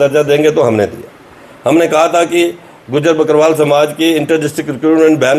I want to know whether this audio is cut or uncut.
uncut